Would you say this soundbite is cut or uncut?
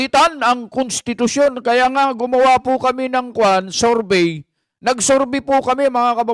uncut